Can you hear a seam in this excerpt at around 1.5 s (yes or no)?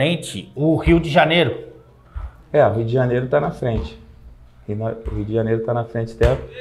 no